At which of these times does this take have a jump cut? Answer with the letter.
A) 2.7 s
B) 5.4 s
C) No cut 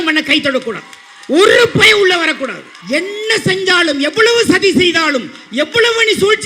A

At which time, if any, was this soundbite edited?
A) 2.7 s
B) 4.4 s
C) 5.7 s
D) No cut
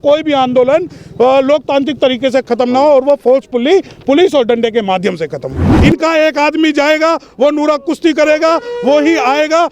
C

